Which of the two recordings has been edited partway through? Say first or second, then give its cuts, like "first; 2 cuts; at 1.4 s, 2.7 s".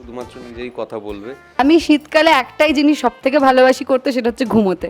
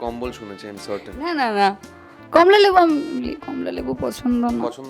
first; 1 cut; at 1.6 s